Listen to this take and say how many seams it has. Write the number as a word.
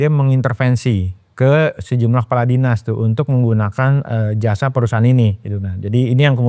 zero